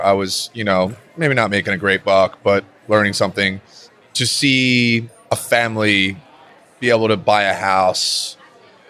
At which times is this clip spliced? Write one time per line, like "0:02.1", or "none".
none